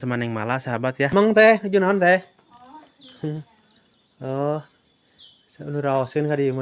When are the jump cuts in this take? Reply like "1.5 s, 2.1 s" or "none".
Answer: 1.1 s